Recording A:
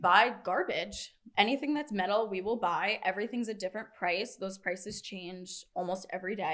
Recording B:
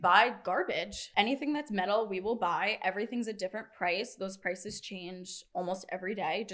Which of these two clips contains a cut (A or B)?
B